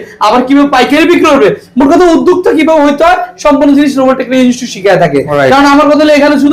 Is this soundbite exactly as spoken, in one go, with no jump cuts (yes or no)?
yes